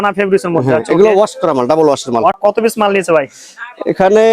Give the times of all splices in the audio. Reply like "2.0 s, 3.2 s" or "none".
2.4 s

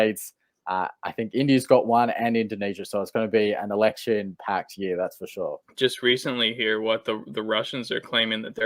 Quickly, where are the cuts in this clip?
5.6 s

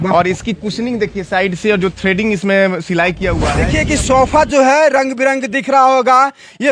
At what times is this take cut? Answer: 3.5 s

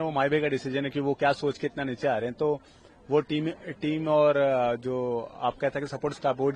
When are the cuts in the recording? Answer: none

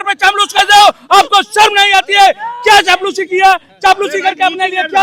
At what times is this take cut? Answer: none

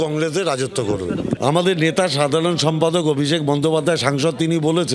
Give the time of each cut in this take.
1.4 s

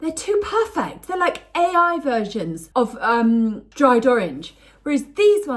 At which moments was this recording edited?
2.6 s, 3.7 s

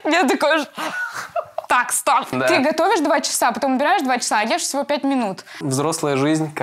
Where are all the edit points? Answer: 2.3 s, 5.6 s

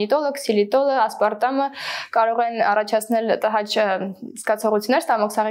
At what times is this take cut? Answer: none

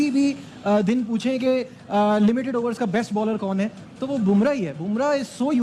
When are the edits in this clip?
none

